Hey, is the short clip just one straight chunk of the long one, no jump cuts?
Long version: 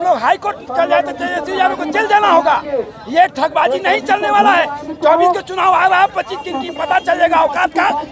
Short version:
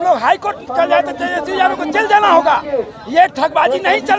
yes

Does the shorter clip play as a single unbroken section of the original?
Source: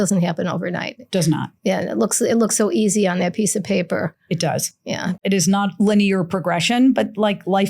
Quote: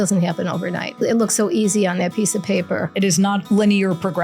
no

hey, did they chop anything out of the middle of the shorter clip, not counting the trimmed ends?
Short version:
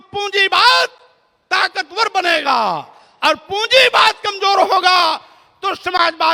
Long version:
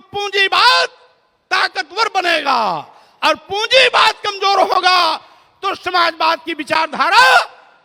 no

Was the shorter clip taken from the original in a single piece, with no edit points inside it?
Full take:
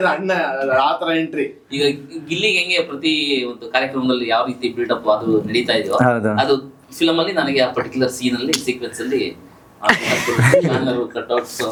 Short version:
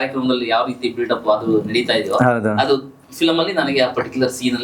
yes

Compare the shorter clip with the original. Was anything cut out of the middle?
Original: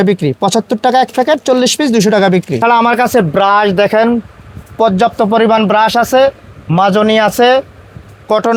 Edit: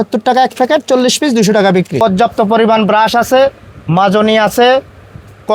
yes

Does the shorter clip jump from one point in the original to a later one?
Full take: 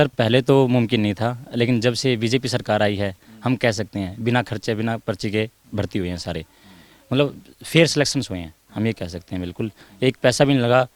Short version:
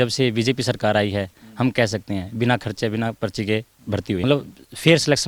yes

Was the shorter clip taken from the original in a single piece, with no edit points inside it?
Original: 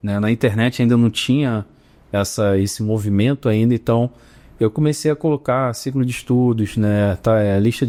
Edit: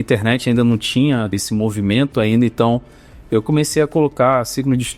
no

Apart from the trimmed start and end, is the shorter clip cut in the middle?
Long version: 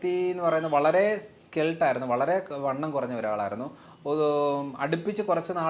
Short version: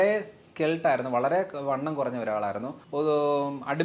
yes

